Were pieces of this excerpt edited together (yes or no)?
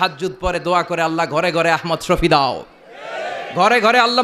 no